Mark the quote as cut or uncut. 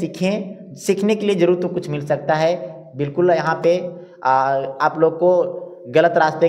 uncut